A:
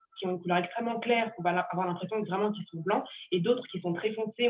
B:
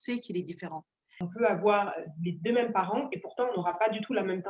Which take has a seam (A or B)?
B